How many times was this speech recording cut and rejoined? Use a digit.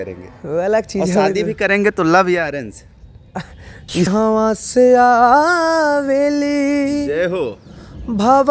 1